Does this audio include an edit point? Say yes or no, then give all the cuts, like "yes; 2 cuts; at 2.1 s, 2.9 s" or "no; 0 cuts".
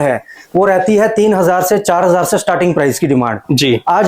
no; 0 cuts